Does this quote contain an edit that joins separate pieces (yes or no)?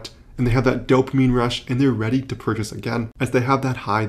yes